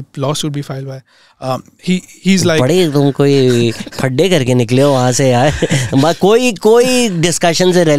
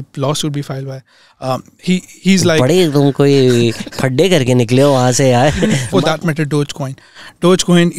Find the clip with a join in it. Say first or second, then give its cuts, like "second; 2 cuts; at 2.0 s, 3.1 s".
second; 1 cut; at 5.8 s